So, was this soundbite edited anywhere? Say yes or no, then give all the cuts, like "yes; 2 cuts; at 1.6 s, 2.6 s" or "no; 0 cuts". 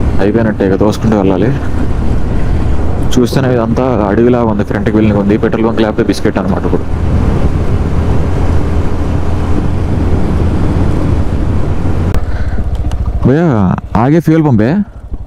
yes; 1 cut; at 12.1 s